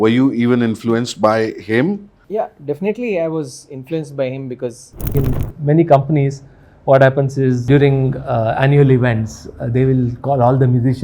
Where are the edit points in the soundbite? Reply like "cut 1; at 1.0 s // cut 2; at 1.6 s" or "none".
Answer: cut 1; at 2.1 s // cut 2; at 5.1 s // cut 3; at 7.6 s